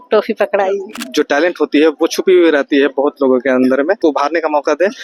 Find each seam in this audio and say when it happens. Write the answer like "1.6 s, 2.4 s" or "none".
1.0 s